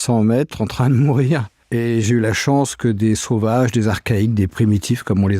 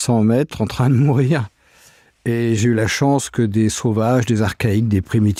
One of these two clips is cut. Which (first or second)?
first